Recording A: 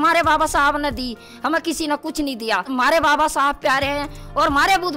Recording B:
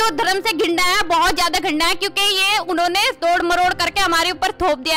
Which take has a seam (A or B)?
A